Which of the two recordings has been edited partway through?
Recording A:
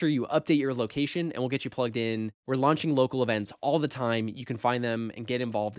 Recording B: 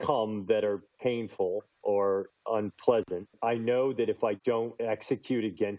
B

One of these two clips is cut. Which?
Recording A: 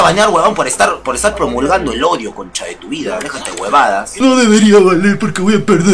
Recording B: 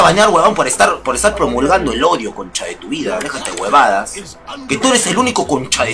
A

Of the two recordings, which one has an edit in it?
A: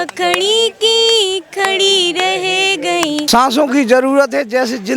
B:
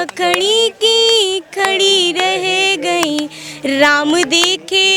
A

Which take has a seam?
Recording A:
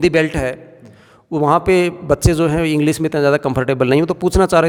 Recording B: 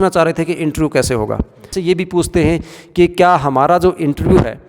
B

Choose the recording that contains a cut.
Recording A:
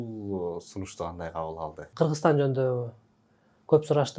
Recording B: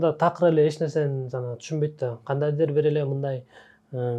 A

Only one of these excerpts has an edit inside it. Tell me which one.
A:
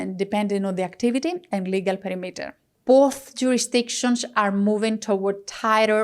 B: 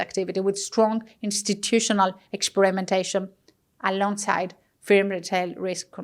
A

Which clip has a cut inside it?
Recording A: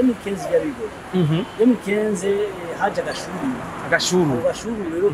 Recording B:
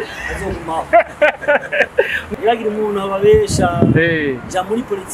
B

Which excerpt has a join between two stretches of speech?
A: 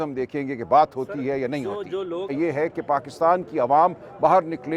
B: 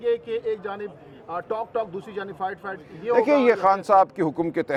A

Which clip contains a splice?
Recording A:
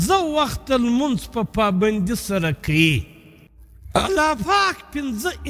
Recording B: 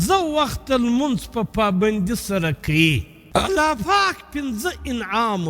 B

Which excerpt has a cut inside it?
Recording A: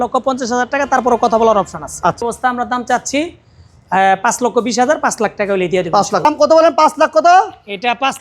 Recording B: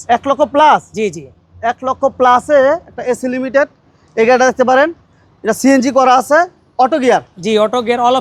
A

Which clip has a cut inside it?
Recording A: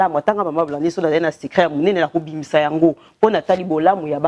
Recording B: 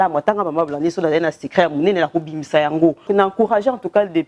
B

